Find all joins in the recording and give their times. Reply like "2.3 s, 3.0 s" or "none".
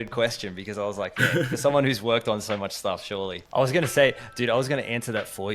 3.4 s